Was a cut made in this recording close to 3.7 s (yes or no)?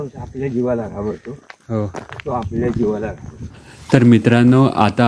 yes